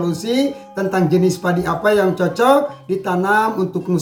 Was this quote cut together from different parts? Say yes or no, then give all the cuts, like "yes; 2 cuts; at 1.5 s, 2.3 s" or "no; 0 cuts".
no; 0 cuts